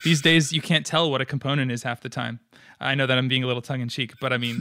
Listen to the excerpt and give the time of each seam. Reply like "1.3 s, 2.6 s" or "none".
none

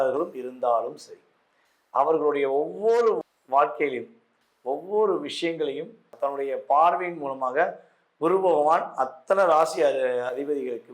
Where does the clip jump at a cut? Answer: 6.1 s

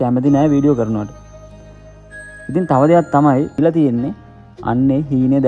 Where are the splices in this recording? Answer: 3.6 s

